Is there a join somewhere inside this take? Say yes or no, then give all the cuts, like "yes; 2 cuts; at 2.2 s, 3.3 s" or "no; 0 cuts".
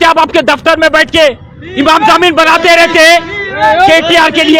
no; 0 cuts